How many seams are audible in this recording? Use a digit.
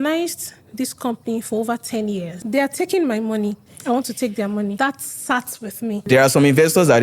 4